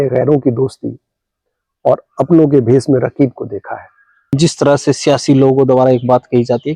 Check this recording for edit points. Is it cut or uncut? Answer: cut